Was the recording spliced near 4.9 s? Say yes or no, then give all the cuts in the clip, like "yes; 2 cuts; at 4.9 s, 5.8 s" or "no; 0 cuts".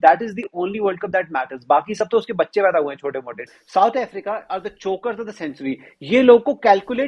no; 1 cut; at 3.4 s